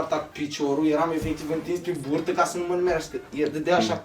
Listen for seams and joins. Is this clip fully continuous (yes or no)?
yes